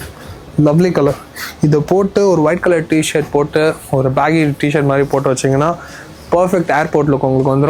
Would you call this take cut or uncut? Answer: uncut